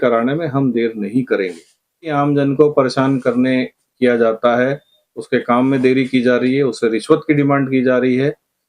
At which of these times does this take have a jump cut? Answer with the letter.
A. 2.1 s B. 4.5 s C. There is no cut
A